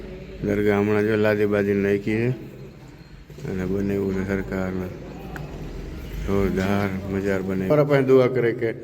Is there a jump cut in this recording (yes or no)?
yes